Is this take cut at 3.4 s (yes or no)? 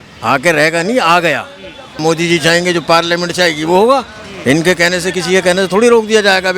no